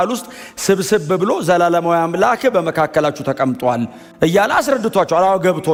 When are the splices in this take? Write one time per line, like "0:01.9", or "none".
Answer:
none